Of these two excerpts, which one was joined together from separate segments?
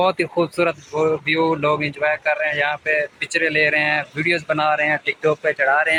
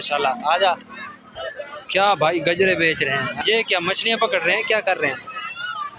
second; 1 cut; at 3.4 s

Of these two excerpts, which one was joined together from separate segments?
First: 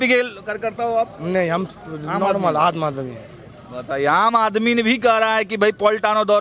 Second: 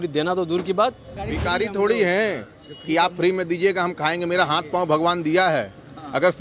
second; 1 cut; at 1.1 s

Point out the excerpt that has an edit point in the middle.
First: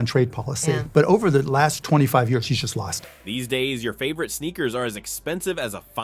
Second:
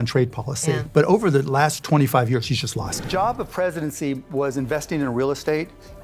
second; 1 cut; at 3.0 s

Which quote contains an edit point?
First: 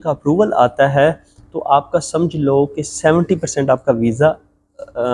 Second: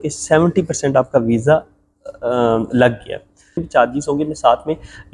second; 1 cut; at 3.7 s

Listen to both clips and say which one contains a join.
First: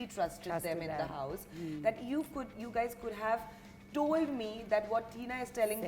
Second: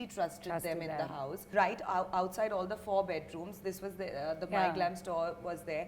second; 1 cut; at 1.4 s

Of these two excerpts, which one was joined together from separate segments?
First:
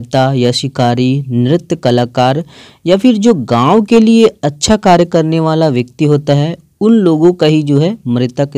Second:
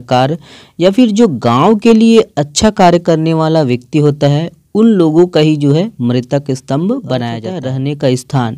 second; 1 cut; at 7.5 s

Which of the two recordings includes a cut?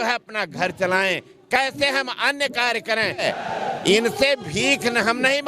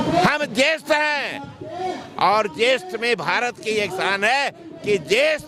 first; 1 cut; at 3.2 s

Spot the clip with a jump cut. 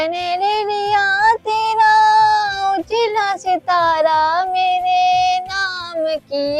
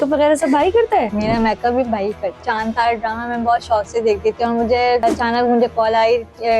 second; 3 cuts; at 1.1 s, 2.4 s, 5.0 s

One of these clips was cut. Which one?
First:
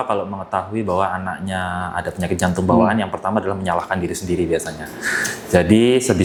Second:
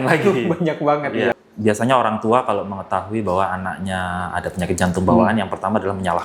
second; 1 cut; at 1.3 s

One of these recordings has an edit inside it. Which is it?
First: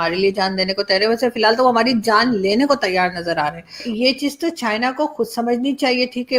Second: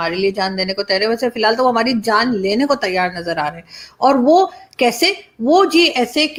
first; 1 cut; at 3.9 s

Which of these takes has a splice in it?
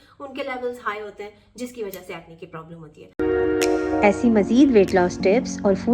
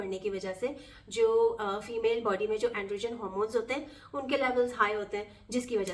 first; 1 cut; at 3.0 s

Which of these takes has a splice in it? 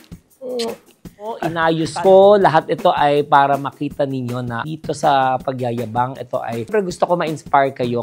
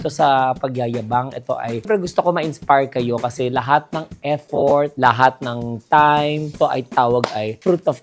first; 1 cut; at 1.5 s

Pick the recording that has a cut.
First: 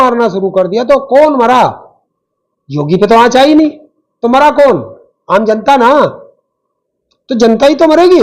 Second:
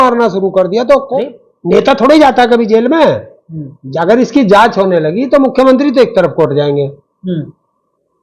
second; 1 cut; at 1.1 s

